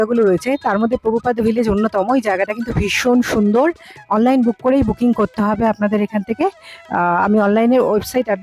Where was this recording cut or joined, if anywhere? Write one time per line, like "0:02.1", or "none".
none